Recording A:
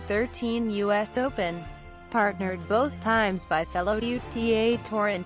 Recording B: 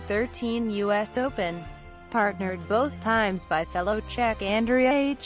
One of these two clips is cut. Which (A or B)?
B